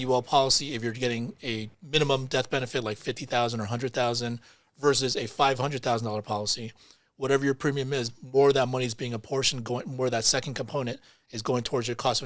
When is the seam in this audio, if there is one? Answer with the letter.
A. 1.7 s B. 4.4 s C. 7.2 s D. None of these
A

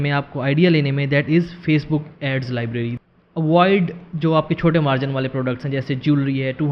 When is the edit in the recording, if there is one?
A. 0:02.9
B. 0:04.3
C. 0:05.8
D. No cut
A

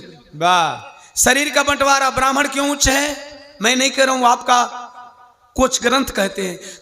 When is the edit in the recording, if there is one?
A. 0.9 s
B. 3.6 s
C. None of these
C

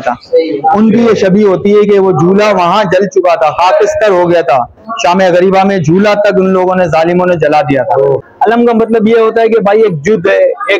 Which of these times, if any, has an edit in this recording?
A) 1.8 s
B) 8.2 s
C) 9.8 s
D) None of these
B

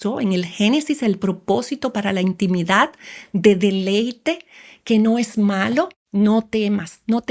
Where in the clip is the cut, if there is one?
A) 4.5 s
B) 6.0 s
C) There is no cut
B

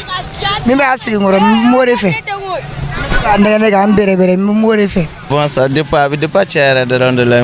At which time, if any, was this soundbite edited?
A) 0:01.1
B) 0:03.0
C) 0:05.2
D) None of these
C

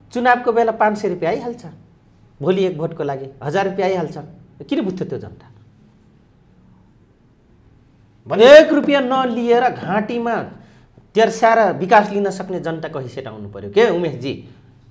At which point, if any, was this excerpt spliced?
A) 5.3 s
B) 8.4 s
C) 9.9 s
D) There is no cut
D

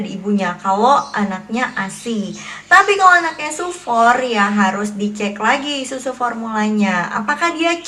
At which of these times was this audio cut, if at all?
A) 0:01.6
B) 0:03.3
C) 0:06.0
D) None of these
D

